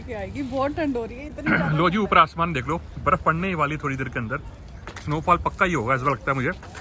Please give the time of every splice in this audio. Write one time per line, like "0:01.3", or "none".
none